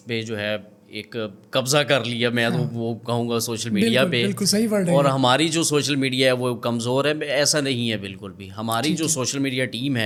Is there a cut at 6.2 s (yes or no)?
no